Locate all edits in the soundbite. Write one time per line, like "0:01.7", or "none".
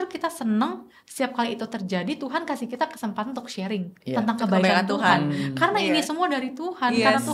none